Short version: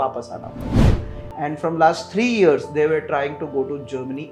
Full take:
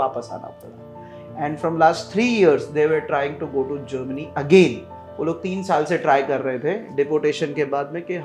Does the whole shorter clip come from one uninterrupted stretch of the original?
yes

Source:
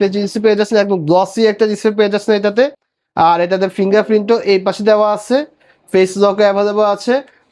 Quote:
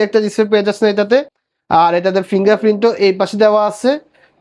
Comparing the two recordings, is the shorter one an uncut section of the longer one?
yes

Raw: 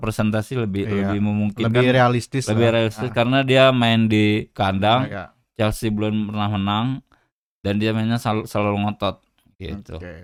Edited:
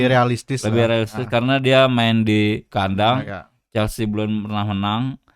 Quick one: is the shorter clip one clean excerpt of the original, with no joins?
yes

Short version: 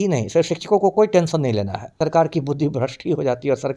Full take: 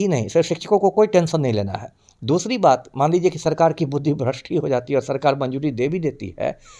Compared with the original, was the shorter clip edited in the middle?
yes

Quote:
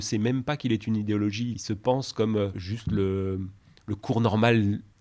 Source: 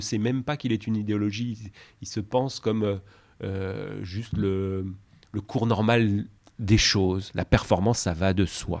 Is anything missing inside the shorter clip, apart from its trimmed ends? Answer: yes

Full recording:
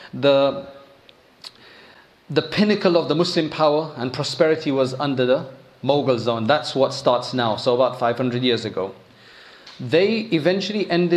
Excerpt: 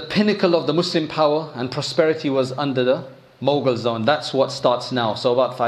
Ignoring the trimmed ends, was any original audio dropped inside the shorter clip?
no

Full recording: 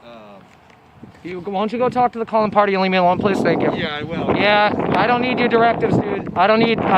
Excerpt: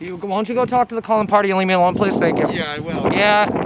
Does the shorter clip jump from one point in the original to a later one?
no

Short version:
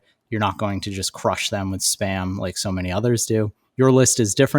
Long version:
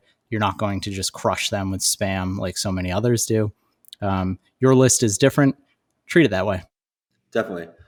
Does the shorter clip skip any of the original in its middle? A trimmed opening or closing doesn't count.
yes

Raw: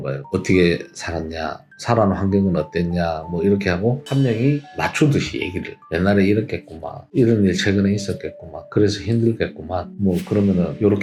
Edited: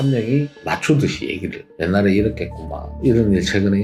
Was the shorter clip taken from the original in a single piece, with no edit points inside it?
yes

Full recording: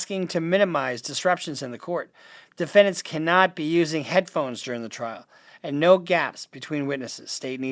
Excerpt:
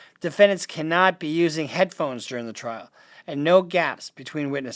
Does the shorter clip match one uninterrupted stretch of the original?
yes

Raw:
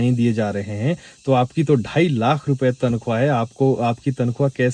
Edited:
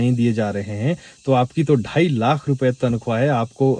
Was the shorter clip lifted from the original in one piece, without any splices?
yes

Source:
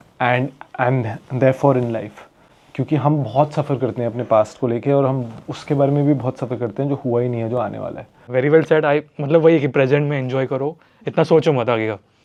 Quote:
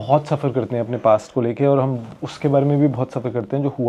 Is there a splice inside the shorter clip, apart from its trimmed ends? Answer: no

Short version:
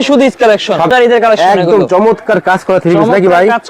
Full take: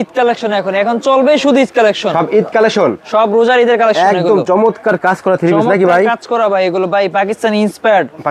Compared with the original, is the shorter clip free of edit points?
no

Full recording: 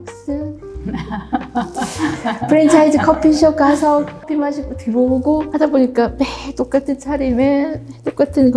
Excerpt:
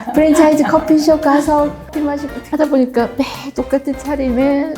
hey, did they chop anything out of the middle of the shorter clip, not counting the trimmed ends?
yes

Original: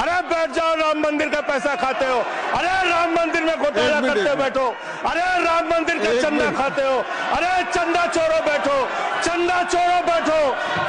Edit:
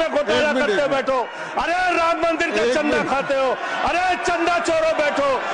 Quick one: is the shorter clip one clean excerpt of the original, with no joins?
yes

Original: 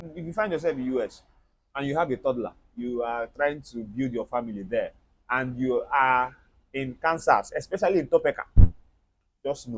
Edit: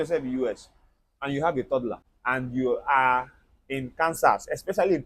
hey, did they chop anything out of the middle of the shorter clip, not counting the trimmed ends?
yes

